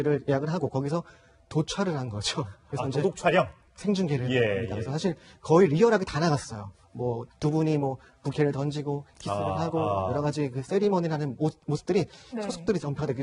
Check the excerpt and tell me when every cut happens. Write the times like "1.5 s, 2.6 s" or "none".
8.3 s